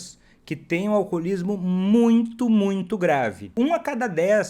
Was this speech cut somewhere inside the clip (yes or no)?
yes